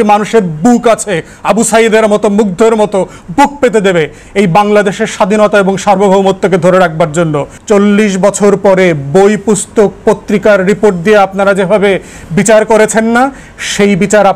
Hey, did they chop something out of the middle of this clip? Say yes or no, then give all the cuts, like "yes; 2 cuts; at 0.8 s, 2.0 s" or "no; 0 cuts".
yes; 1 cut; at 7.5 s